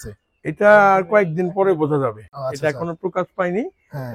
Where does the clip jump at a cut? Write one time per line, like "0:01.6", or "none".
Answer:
none